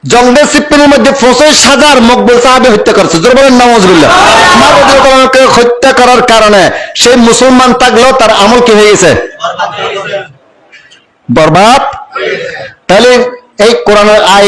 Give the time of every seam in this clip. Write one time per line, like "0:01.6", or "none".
0:04.6